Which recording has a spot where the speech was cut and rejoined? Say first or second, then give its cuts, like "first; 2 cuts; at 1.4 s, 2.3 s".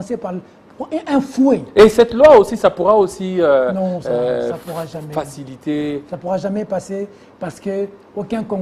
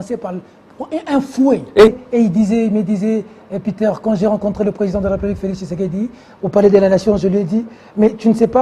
second; 1 cut; at 1.9 s